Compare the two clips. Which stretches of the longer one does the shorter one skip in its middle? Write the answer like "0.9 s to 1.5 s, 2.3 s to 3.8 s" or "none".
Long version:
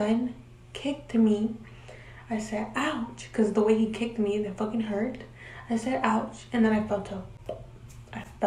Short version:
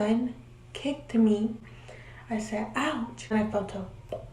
3.3 s to 6.7 s